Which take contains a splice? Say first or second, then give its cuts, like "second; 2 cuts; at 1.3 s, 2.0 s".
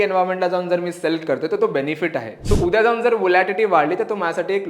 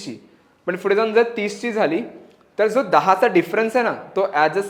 first; 1 cut; at 2.3 s